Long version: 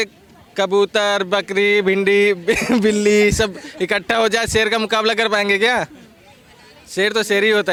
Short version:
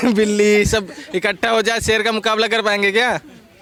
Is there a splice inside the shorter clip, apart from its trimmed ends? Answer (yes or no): no